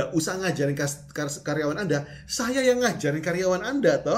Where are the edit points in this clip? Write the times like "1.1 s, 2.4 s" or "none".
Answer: none